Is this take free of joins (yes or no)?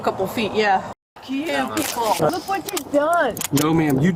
no